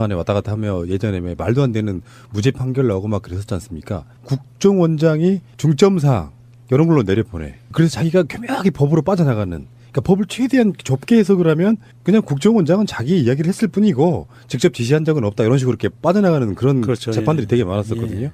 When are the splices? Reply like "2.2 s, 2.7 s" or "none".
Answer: 1.4 s